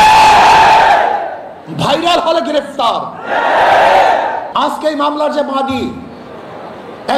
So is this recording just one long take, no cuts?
no; 1 cut; at 4.4 s

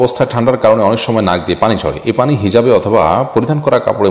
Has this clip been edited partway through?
no; 0 cuts

